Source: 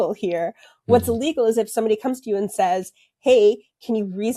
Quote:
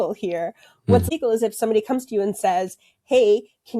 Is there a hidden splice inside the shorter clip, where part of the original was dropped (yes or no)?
yes